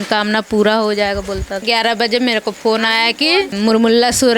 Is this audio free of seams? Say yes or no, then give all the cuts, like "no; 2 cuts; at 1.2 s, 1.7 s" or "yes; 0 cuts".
no; 2 cuts; at 1.6 s, 3.5 s